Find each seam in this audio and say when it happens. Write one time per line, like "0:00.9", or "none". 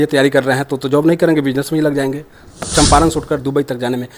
0:02.7

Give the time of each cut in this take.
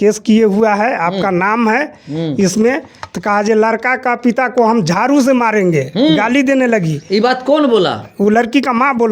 none

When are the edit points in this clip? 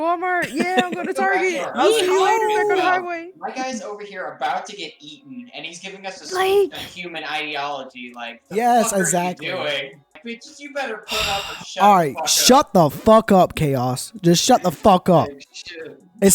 0:10.2

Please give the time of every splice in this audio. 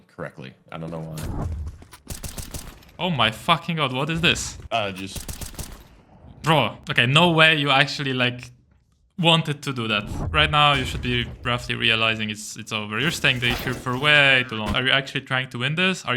0:01.4
0:04.5
0:06.8
0:10.2
0:14.7

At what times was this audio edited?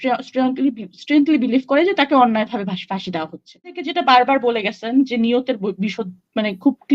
0:03.8

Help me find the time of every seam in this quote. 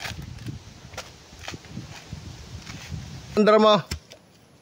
0:03.4

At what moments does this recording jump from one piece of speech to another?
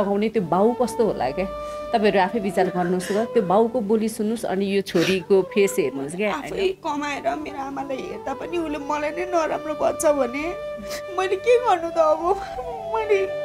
0:06.4

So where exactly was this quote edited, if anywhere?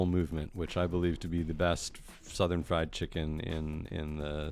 none

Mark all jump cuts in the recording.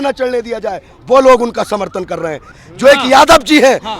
0:02.6

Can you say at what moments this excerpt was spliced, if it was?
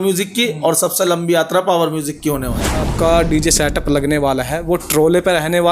0:02.9

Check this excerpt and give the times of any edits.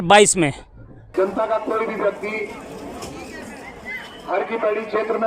0:00.9

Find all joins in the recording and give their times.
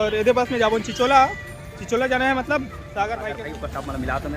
0:03.4

